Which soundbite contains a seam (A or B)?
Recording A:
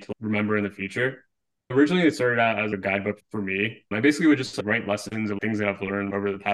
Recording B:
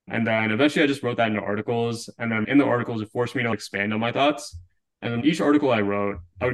A